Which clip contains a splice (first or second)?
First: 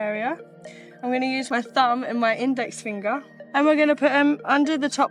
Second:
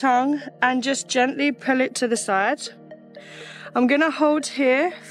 first